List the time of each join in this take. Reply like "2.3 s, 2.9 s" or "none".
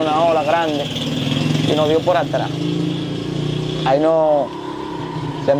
none